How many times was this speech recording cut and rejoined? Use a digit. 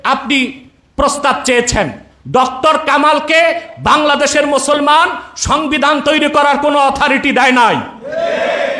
0